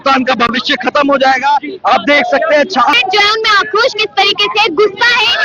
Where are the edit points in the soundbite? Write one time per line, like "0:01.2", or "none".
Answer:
0:03.0